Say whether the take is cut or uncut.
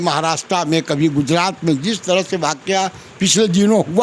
uncut